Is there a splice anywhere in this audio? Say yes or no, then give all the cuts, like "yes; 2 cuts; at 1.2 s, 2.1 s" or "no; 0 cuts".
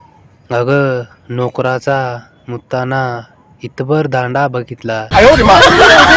yes; 1 cut; at 5.1 s